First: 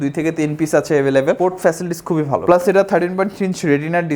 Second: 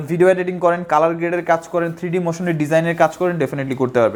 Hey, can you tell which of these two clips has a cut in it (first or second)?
first